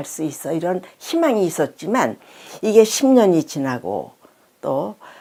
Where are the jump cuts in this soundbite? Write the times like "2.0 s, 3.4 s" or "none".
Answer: none

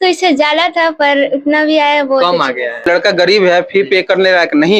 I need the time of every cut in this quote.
2.9 s

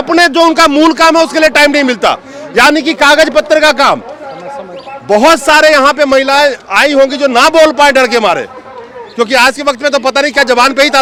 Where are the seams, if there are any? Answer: none

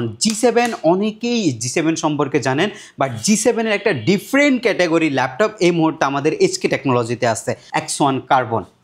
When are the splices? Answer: 7.6 s

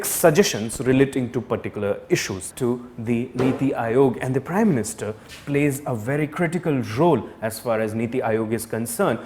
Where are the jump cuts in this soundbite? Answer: 2.4 s

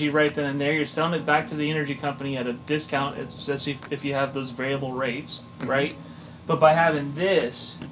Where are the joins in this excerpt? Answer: none

